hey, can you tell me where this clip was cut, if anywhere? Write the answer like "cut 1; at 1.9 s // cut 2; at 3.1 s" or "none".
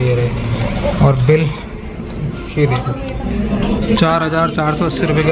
none